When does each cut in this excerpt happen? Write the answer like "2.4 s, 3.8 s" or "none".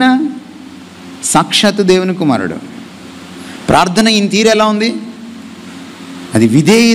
none